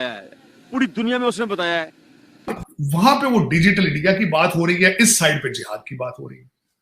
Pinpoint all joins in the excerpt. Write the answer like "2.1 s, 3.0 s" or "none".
2.6 s